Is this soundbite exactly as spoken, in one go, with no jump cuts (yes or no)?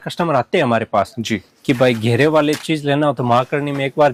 yes